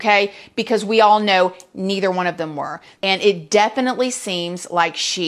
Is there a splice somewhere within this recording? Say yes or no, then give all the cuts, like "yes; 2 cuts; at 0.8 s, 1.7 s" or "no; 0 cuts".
yes; 1 cut; at 2.8 s